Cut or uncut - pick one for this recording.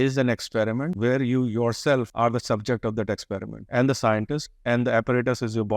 cut